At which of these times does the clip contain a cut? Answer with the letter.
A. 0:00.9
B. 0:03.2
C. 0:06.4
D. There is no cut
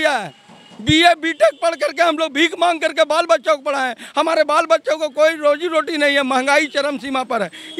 D